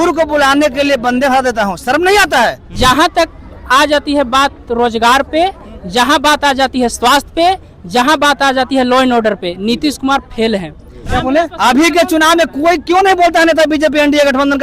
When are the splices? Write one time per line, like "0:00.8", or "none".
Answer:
0:02.7
0:11.0